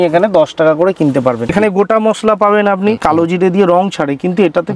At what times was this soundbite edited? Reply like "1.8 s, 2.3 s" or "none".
1.5 s, 3.0 s